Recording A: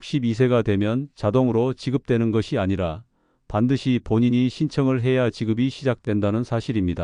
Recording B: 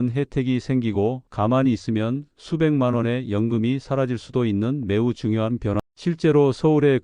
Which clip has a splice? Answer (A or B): B